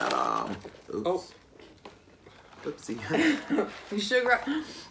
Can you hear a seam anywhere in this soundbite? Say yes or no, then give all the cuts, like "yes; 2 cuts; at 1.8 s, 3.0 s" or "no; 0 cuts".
no; 0 cuts